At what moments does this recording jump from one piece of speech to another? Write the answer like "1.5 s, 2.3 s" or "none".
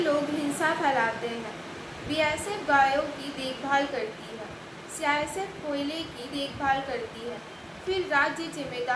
none

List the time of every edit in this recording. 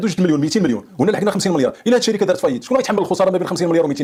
none

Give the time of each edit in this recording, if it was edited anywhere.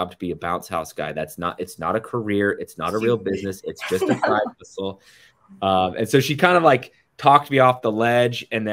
none

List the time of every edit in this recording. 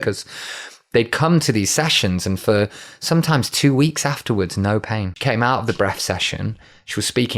5.1 s

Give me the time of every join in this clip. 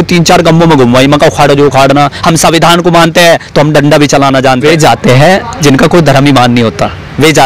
4.6 s

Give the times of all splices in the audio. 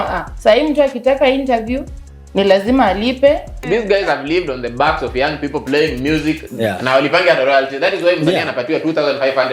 3.6 s

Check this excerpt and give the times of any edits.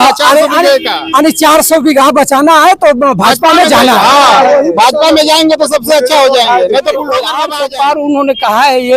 7.4 s

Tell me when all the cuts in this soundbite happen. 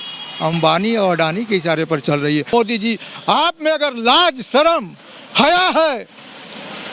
2.5 s

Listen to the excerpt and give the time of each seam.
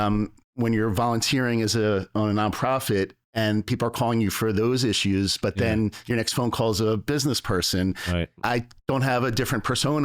8.4 s

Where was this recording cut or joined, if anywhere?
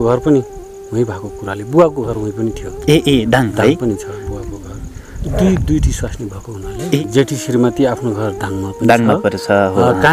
7.0 s

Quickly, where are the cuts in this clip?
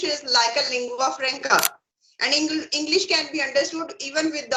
none

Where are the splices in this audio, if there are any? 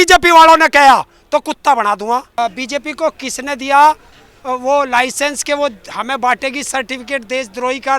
2.4 s

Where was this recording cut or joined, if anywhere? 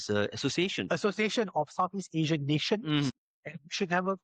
3.1 s

